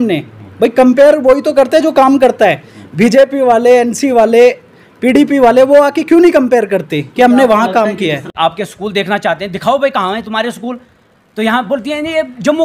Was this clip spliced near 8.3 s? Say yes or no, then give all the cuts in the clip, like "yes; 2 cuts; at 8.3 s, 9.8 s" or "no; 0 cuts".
yes; 1 cut; at 8.3 s